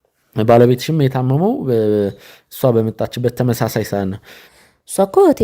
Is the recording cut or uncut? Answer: cut